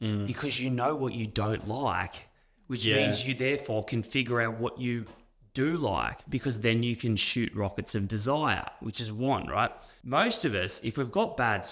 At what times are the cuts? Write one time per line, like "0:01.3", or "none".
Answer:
0:06.2
0:09.9